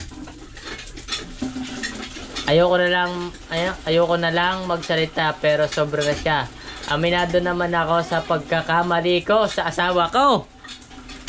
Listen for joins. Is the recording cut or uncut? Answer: uncut